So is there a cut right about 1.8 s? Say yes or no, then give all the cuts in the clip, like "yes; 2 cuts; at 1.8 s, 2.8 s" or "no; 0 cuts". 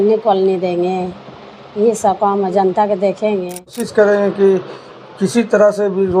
no; 1 cut; at 3.8 s